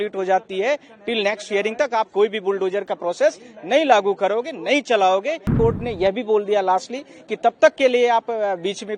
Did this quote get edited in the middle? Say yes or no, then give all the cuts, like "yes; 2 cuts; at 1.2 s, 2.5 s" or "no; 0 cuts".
yes; 1 cut; at 5.5 s